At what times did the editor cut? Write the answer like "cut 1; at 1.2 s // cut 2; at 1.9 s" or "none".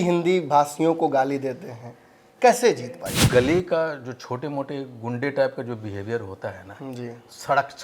cut 1; at 3.1 s